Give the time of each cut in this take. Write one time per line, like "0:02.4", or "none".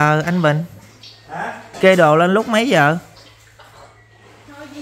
none

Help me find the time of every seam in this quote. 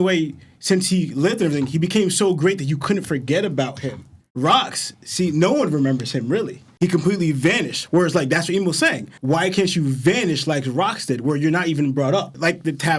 none

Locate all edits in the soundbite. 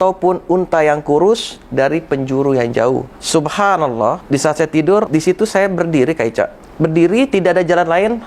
0:03.2
0:04.2
0:05.1
0:06.6

